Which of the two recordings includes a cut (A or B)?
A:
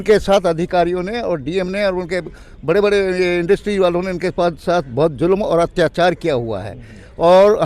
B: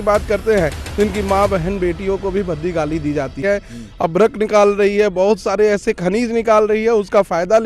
B